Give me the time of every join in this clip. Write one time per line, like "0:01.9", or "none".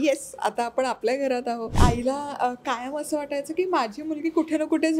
0:01.8